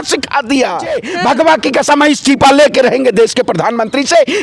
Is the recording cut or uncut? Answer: cut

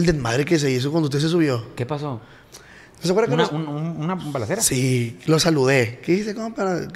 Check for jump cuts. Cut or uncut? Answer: uncut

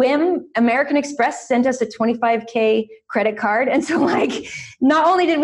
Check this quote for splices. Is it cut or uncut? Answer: uncut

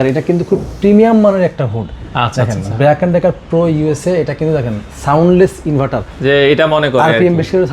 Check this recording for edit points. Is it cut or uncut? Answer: uncut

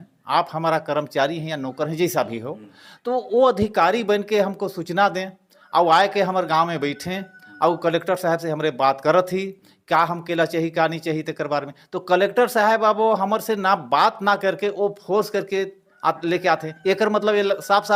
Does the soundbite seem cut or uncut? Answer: uncut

